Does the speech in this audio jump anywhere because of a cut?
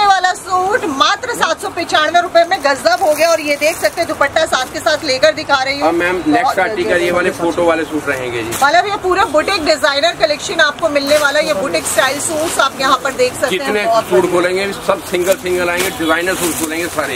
no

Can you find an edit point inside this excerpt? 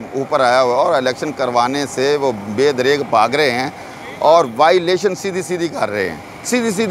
no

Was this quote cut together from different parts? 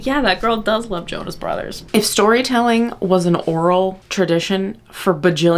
yes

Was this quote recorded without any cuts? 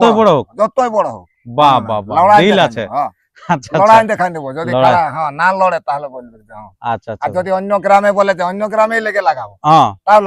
yes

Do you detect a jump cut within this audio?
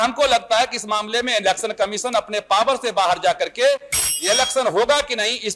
no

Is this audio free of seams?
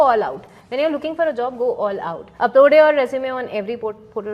no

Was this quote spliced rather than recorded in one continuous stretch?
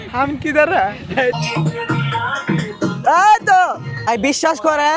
yes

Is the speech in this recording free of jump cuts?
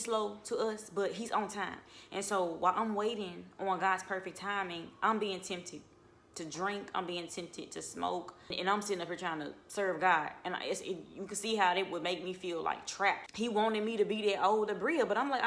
no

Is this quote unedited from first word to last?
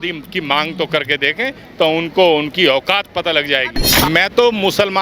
no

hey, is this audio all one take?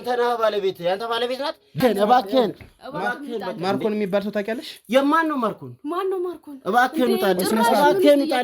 no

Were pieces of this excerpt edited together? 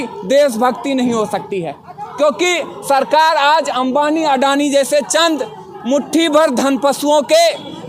no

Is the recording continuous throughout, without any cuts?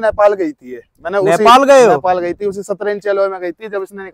yes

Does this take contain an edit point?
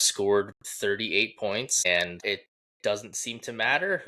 yes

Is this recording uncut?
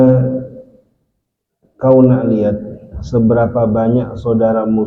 yes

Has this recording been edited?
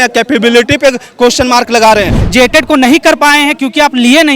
yes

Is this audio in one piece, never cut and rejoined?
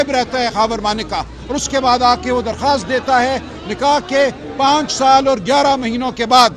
yes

